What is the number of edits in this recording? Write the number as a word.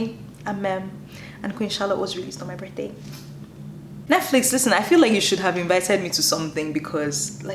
two